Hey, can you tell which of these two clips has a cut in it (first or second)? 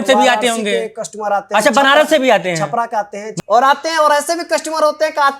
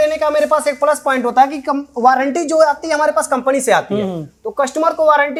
first